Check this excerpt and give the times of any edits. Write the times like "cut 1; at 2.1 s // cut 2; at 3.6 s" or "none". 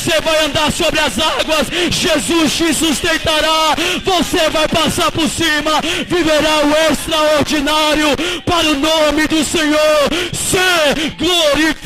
none